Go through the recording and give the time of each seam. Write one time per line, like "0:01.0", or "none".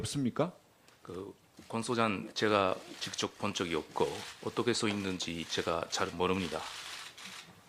0:01.6